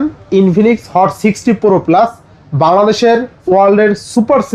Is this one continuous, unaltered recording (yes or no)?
yes